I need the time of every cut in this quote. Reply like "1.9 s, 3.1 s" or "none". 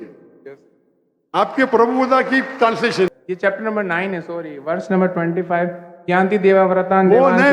3.1 s